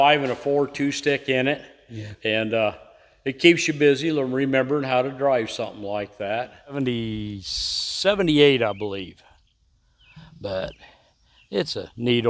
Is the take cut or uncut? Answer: cut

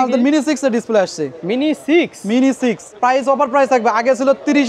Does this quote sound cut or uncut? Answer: cut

